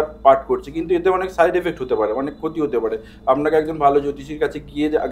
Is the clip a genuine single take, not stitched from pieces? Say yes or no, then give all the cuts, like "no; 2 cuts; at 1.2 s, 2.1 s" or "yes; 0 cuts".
yes; 0 cuts